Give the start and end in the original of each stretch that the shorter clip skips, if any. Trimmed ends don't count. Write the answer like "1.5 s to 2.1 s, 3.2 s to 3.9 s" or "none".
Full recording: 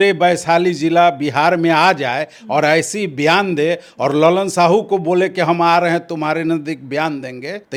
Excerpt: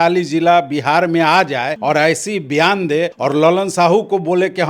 2.2 s to 2.4 s, 3.8 s to 3.9 s

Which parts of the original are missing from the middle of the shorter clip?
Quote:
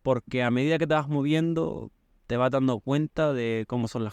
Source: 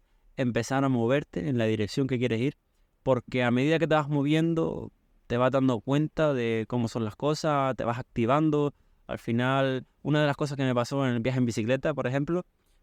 none

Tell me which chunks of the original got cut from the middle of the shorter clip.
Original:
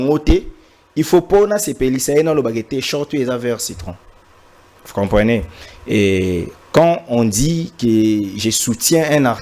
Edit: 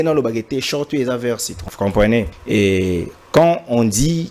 3.8 s to 4.7 s, 5.5 s to 5.8 s

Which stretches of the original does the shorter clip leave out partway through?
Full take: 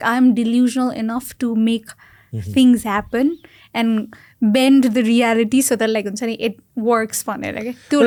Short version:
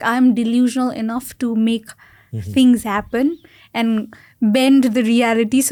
none

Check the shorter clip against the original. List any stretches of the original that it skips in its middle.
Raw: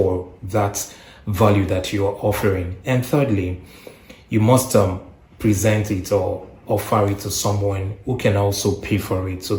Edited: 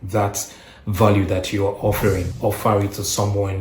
2.7 s to 6.6 s

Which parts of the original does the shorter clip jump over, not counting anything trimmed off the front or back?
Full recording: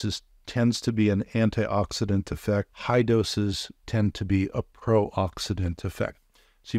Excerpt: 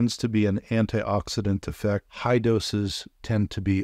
none

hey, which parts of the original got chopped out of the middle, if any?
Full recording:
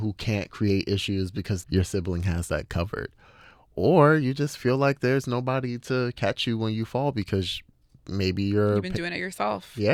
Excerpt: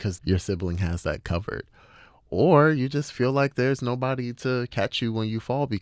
none

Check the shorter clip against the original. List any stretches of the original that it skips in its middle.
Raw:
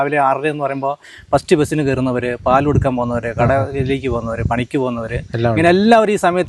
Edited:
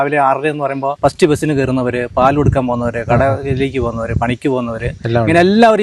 1.0 s to 1.2 s

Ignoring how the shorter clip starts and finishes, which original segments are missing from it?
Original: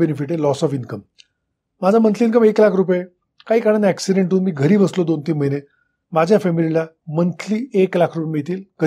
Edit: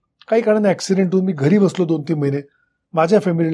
none

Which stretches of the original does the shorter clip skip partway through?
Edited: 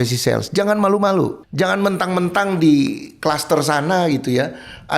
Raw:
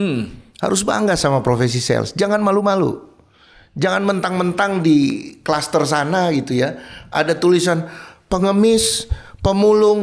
3.1 s to 3.7 s

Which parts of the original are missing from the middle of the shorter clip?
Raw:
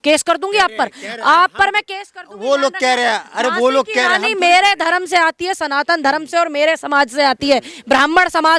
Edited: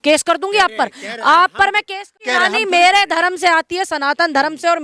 2.3 s to 4.0 s

